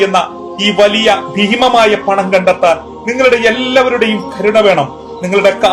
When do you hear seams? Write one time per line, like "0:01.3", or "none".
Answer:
none